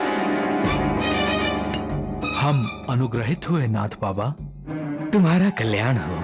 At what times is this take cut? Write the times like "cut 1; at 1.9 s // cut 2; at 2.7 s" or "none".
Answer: none